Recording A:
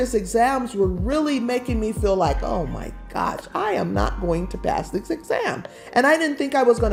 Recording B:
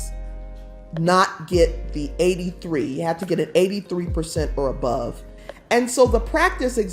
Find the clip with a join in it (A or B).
B